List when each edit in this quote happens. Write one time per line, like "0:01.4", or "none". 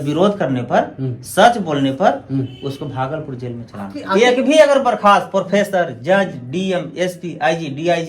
0:04.1